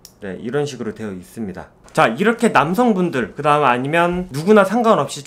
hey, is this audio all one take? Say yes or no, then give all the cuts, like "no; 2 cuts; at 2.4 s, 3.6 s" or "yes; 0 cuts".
yes; 0 cuts